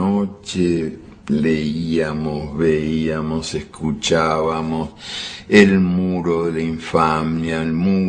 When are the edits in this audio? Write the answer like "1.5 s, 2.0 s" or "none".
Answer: 3.9 s